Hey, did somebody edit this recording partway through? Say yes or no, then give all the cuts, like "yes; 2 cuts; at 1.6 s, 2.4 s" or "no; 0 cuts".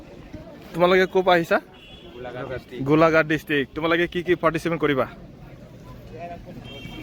no; 0 cuts